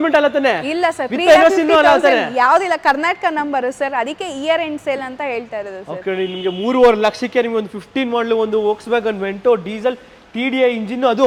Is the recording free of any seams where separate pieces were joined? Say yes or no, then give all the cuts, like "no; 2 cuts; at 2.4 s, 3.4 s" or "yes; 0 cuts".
yes; 0 cuts